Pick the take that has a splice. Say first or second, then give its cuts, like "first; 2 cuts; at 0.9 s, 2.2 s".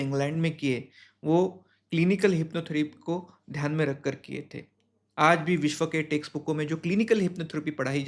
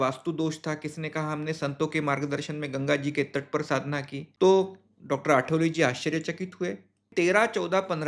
second; 2 cuts; at 4.2 s, 7.1 s